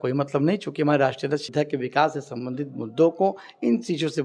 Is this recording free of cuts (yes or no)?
no